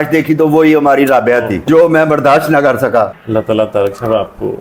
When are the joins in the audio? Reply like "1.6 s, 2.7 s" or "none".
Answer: 3.2 s